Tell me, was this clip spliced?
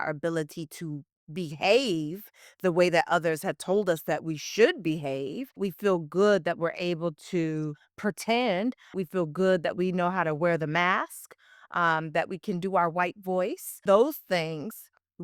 yes; 3 cuts; at 5.6 s, 8.9 s, 13.8 s

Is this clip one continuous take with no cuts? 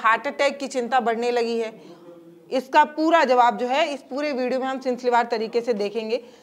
yes; 0 cuts

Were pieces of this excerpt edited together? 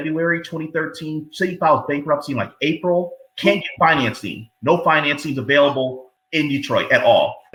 no; 0 cuts

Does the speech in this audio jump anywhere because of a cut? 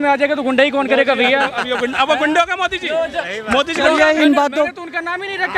no; 0 cuts

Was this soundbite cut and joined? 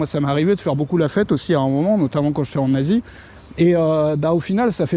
no; 0 cuts

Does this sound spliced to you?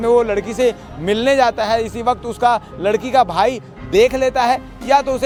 no; 0 cuts

